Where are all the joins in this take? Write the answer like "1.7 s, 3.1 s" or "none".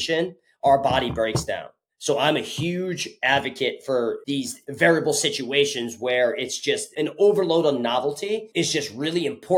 4.2 s, 8.5 s